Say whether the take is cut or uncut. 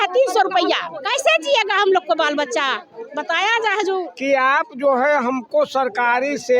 cut